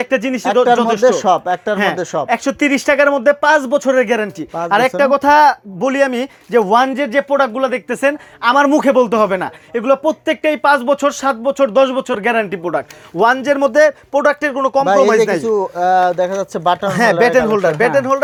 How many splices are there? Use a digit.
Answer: 0